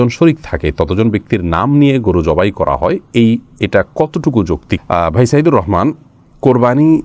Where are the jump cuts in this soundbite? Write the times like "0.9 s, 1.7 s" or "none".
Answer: none